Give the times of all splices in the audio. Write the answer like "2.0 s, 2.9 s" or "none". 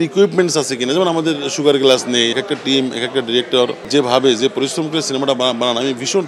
2.3 s, 3.8 s